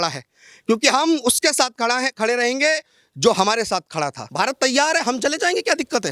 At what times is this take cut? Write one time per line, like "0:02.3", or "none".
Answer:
0:04.2